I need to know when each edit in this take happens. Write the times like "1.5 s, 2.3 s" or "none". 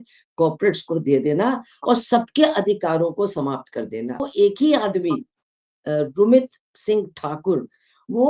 4.2 s